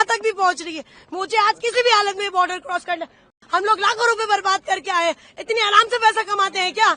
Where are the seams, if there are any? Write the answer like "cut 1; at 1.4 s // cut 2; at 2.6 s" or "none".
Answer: cut 1; at 3.3 s